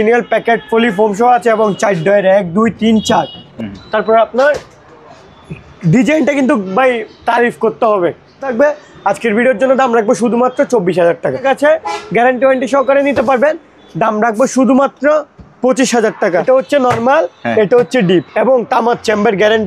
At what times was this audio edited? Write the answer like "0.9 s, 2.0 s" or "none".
3.4 s, 8.5 s, 11.4 s, 16.4 s